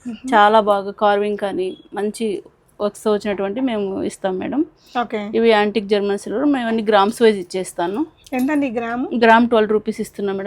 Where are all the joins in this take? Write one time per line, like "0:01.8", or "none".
none

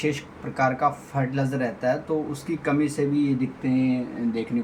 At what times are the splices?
none

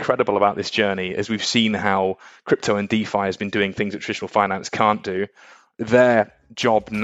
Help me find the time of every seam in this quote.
none

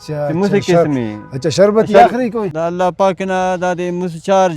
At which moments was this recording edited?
0:02.5

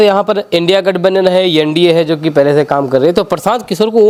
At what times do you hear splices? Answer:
none

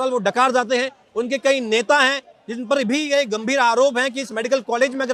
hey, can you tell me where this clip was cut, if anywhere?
none

